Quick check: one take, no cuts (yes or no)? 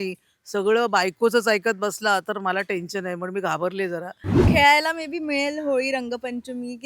no